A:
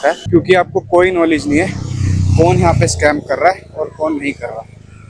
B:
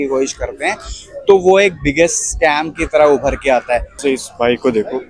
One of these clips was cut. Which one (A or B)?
B